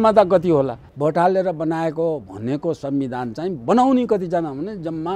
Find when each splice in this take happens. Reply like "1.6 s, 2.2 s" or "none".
0.9 s